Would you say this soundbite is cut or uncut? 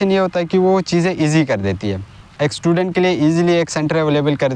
uncut